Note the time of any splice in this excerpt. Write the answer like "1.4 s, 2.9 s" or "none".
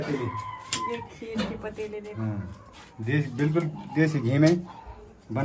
none